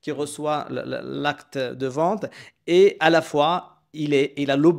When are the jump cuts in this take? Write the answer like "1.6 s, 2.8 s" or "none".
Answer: none